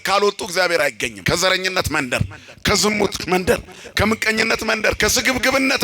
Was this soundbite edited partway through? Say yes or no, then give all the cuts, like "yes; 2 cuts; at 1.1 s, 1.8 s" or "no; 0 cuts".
yes; 1 cut; at 1.1 s